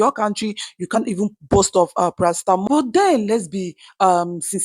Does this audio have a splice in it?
yes; 1 cut; at 2.6 s

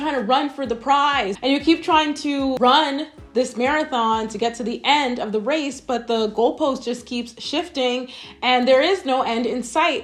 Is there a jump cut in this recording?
no; 0 cuts

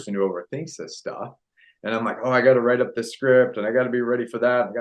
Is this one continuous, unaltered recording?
yes; 0 cuts

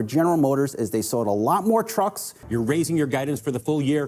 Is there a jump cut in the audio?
yes; 1 cut; at 2.4 s

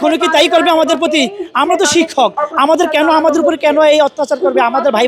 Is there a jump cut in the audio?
no; 0 cuts

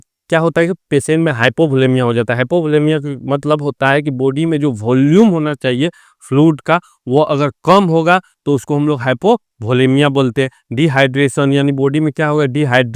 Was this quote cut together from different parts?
no; 0 cuts

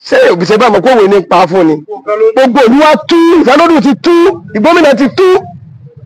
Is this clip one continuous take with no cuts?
no; 1 cut; at 2.3 s

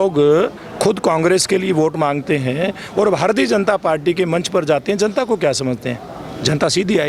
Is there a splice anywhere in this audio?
no; 0 cuts

